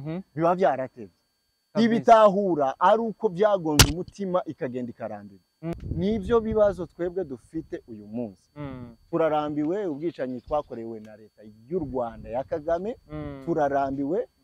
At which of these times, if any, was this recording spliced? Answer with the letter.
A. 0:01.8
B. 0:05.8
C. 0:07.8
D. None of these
B